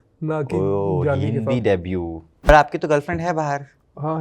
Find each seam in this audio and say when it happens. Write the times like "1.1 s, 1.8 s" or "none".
2.5 s

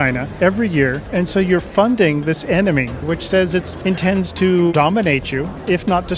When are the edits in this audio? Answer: 1.0 s, 3.0 s, 3.7 s, 5.1 s

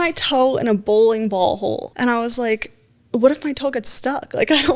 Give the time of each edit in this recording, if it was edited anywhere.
1.9 s

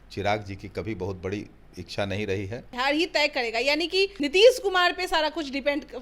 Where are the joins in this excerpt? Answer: 2.7 s, 4.1 s

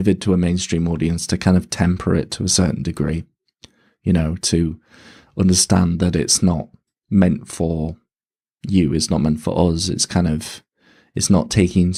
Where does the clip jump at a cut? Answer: none

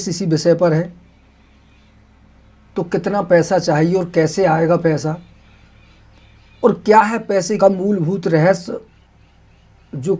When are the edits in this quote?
7.6 s

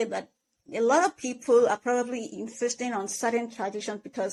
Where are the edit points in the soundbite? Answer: none

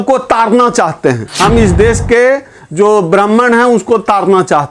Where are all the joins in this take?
1.3 s

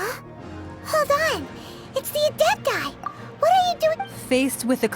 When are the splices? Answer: 4.0 s

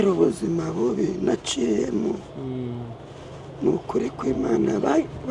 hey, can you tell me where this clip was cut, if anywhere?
none

